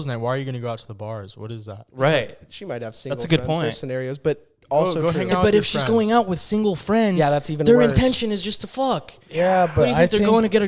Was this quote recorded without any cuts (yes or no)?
yes